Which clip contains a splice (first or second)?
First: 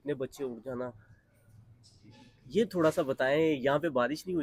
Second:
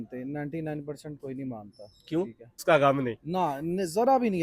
second